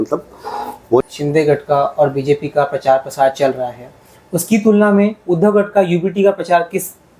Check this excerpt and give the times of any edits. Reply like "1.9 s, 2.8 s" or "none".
1.0 s